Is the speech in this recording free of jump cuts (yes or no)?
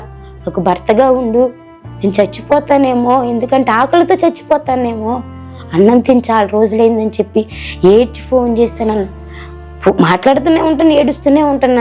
yes